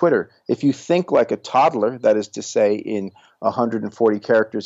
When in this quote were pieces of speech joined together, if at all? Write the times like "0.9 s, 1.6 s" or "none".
none